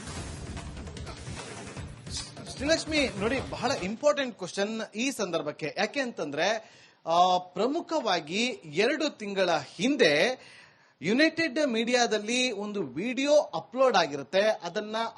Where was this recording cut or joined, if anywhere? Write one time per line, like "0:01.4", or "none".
0:00.8
0:02.2